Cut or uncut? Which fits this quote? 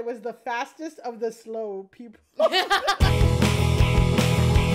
cut